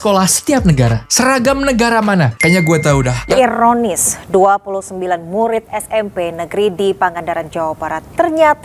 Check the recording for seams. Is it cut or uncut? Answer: cut